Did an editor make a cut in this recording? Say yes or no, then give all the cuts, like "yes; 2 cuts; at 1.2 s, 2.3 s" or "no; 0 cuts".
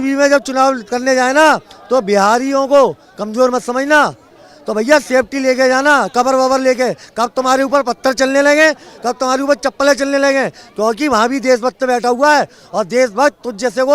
no; 0 cuts